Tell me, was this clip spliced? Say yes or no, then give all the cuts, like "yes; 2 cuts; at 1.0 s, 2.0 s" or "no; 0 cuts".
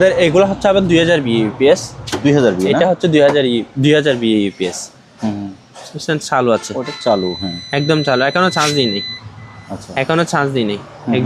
no; 0 cuts